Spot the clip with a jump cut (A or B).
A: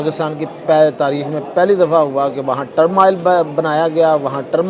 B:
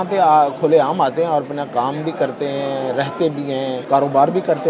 B